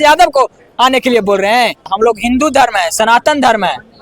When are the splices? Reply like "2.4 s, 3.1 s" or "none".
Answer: 1.9 s

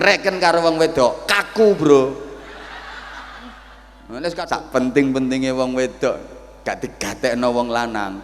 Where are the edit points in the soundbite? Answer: 4.5 s

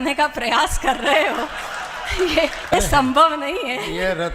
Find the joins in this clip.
2.7 s

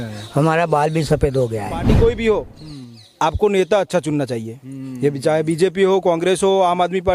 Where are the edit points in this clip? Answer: 1.9 s

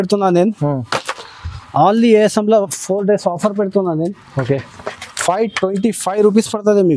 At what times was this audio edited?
none

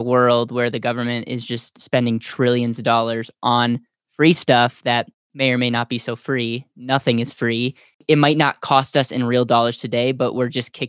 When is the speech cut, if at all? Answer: none

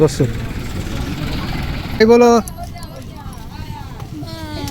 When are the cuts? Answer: 2.0 s

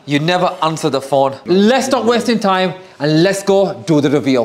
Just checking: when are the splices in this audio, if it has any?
1.4 s

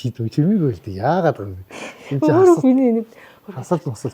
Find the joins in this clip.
none

